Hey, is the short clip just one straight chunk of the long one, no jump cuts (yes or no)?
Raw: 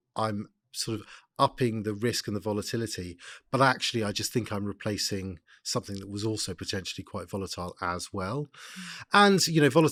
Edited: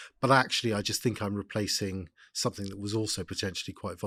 yes